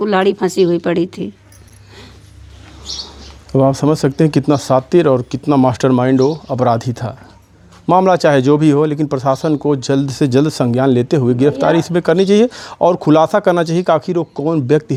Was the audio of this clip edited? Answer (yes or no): no